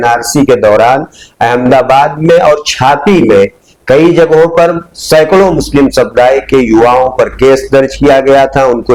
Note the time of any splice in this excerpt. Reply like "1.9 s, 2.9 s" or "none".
none